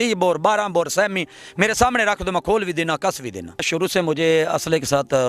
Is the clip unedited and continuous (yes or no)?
no